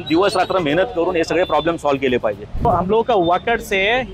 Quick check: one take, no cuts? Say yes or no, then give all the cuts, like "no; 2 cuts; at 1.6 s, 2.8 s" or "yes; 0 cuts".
no; 1 cut; at 2.7 s